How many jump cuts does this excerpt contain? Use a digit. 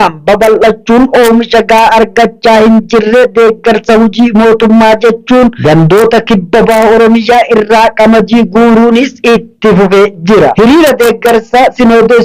1